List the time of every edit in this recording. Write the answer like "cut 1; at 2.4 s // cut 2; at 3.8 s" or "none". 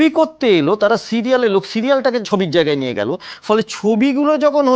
cut 1; at 2.3 s